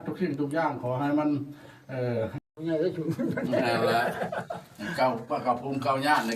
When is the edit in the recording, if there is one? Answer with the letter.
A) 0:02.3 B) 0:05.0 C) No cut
A